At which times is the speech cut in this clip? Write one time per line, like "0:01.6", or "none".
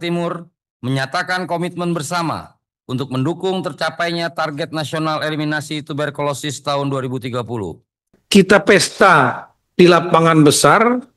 0:08.2

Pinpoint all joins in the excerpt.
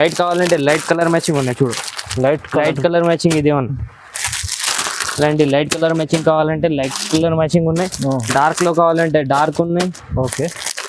none

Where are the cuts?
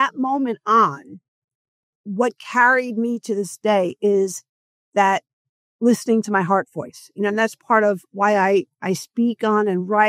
0:03.5

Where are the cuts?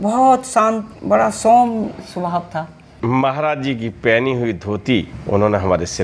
0:02.8
0:05.1

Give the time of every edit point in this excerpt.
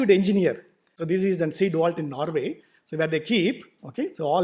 0:00.9

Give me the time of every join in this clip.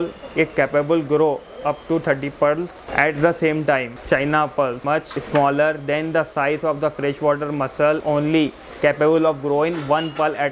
0:02.8
0:03.9
0:04.9
0:08.0

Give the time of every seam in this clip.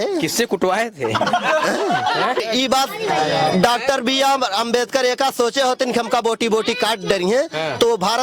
0:02.4

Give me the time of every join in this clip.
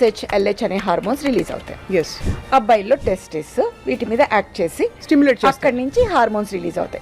0:02.2

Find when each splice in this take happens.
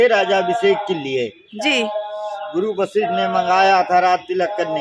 none

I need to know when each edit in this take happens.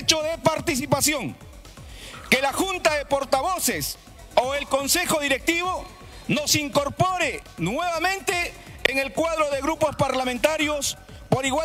none

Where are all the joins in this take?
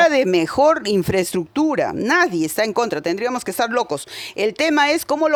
none

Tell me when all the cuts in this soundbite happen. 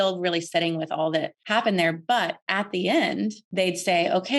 0:01.4
0:02.4
0:03.4

